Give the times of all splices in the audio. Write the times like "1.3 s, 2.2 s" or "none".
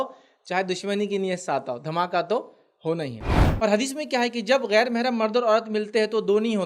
3.2 s